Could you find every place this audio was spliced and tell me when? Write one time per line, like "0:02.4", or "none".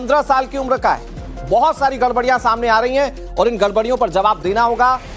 none